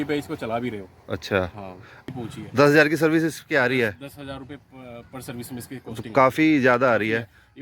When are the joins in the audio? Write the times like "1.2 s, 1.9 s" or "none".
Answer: 2.1 s